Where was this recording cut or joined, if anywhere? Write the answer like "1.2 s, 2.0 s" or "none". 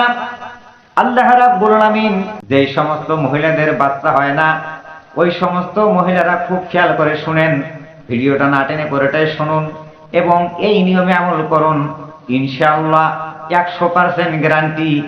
2.3 s